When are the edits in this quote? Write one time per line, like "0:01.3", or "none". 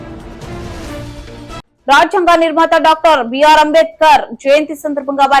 0:01.6